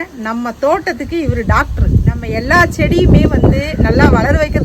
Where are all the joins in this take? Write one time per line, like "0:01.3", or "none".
0:02.2